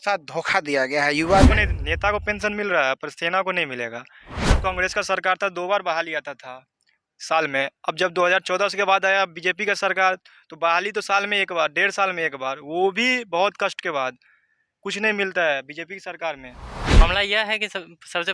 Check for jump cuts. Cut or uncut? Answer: cut